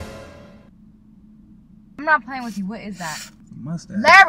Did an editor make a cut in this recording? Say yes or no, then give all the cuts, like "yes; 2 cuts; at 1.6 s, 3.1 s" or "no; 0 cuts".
yes; 1 cut; at 2.0 s